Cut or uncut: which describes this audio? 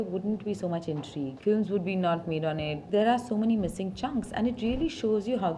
cut